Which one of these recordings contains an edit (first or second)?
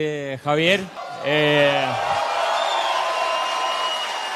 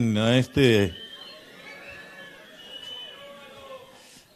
first